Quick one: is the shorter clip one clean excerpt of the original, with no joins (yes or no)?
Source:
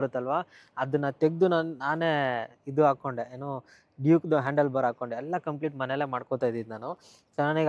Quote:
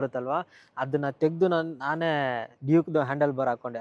no